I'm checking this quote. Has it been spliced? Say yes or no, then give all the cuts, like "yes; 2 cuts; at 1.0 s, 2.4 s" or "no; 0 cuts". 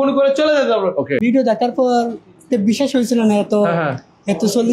yes; 1 cut; at 1.2 s